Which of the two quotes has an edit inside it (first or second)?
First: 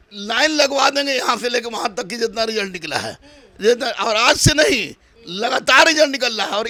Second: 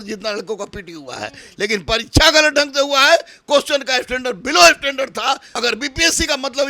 second